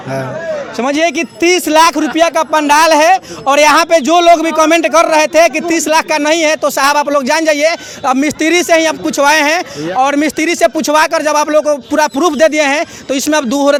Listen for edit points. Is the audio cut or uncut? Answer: uncut